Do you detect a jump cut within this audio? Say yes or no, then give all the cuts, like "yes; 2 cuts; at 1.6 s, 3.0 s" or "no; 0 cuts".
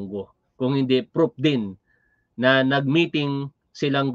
no; 0 cuts